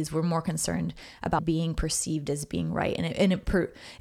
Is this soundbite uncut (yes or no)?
no